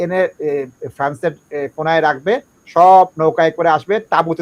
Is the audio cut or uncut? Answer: uncut